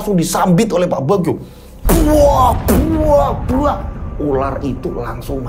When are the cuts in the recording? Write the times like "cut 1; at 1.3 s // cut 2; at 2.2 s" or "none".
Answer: none